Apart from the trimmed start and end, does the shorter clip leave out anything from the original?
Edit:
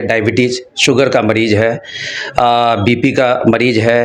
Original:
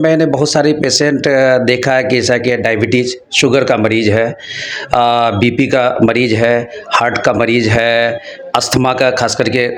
no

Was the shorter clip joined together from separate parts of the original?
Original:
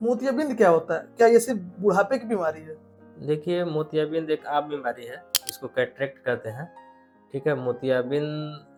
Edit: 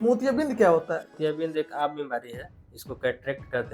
yes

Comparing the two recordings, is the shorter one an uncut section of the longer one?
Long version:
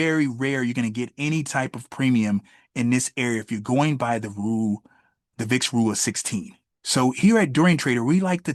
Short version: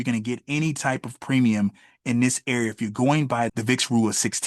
no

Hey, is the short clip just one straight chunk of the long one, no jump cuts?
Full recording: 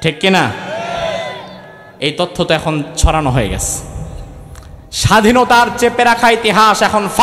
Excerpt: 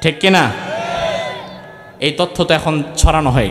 yes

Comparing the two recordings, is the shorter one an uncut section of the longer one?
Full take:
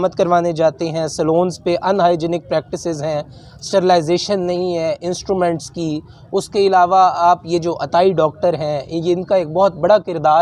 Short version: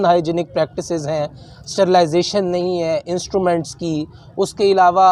yes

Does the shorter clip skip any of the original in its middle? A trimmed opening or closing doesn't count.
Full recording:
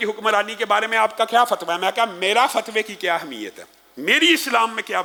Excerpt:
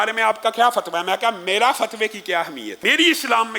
yes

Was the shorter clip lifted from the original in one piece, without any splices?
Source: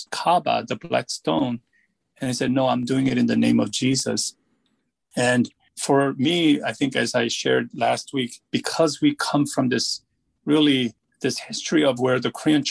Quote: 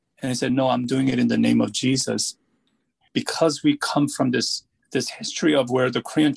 no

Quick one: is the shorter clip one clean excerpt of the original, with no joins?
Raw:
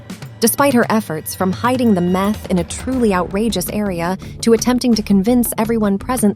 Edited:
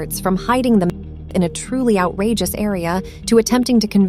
yes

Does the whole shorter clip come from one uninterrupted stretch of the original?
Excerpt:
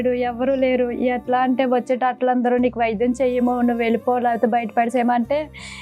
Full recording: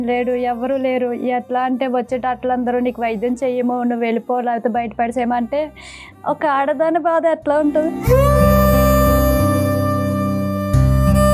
yes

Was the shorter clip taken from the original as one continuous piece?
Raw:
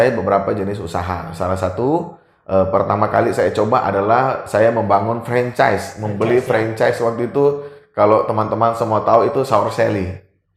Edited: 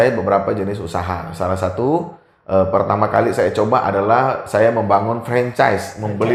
yes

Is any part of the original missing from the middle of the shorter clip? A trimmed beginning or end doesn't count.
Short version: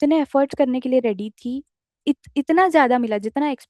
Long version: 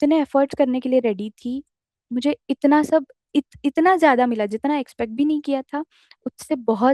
yes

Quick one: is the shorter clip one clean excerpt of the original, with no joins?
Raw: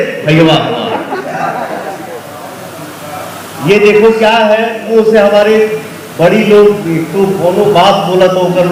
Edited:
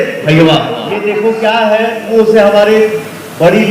no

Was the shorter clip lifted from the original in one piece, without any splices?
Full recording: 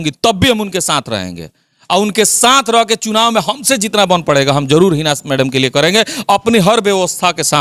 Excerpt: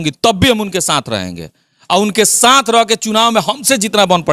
yes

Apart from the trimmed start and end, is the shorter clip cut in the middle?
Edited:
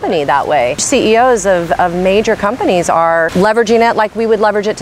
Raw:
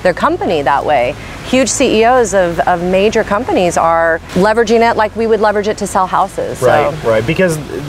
yes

